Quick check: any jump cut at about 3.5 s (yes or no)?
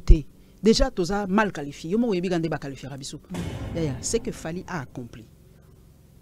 yes